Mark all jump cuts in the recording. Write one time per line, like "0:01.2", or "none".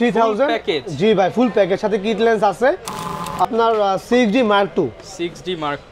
0:03.4